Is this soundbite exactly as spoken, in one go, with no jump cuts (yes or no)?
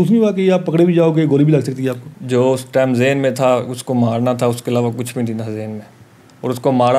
no